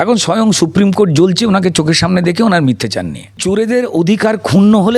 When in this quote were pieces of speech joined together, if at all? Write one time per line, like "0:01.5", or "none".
0:03.4